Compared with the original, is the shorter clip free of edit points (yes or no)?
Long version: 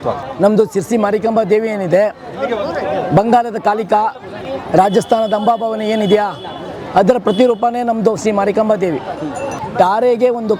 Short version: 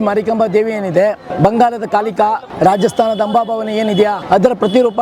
no